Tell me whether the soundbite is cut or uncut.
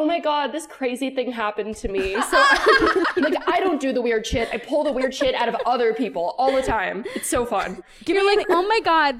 cut